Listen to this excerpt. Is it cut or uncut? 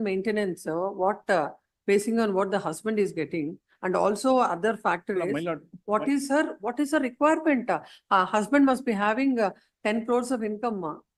uncut